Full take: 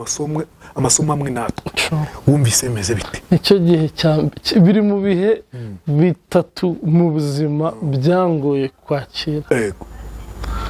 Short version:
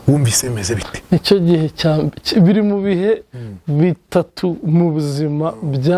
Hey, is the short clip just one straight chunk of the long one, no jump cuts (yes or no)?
yes